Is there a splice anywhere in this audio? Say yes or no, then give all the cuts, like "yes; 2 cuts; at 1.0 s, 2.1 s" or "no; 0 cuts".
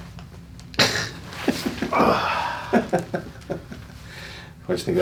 no; 0 cuts